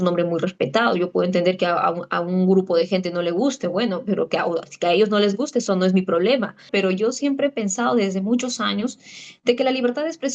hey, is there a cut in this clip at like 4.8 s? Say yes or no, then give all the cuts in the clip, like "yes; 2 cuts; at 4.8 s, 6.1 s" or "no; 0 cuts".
no; 1 cut; at 6.7 s